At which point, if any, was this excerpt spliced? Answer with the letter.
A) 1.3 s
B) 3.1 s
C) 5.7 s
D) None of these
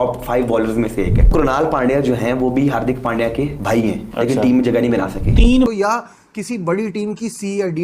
C